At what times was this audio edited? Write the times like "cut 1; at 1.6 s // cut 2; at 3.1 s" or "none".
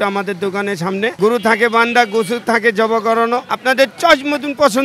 cut 1; at 1.1 s // cut 2; at 3.5 s

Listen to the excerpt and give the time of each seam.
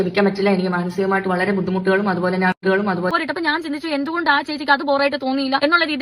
cut 1; at 3.1 s

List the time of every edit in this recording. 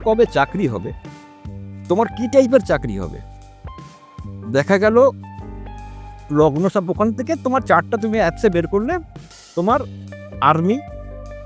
none

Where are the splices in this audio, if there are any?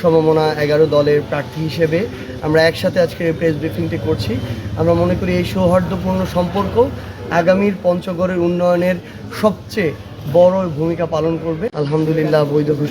cut 1; at 11.7 s

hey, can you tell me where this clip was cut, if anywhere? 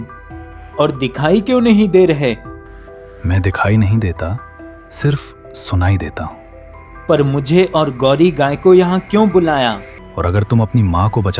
cut 1; at 10.0 s

